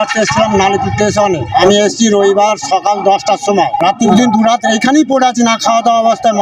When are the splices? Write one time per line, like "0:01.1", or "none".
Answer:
0:01.6
0:04.1